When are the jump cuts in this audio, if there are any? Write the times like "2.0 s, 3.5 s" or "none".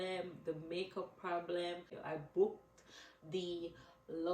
2.0 s